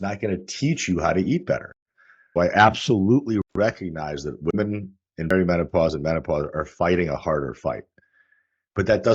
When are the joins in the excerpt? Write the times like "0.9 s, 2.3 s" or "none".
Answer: 2.2 s